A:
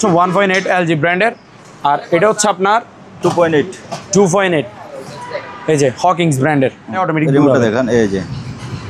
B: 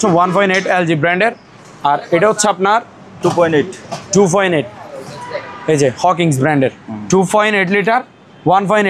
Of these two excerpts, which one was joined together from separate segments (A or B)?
A